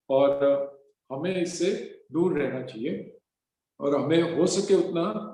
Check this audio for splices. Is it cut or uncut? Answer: uncut